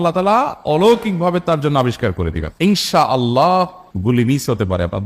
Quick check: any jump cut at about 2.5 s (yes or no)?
yes